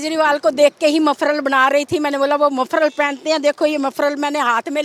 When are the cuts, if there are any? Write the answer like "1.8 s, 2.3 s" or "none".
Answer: none